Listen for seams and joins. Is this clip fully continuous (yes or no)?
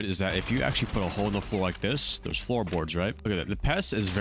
no